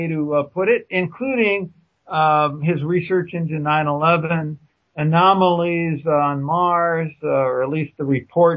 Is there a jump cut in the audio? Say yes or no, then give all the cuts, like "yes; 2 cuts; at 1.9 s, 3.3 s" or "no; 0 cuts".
no; 0 cuts